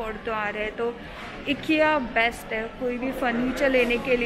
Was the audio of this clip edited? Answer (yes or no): no